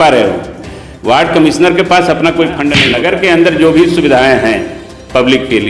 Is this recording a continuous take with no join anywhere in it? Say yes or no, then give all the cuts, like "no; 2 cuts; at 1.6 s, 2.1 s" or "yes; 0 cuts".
no; 1 cut; at 2.8 s